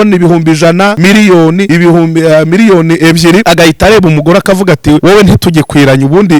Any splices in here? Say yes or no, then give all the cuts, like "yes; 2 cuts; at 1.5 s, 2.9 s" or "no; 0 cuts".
yes; 4 cuts; at 1.0 s, 1.7 s, 3.4 s, 5.0 s